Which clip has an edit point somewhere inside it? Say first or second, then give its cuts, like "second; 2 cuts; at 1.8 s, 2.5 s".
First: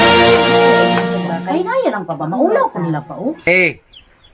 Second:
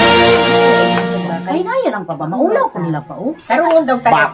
first; 1 cut; at 3.4 s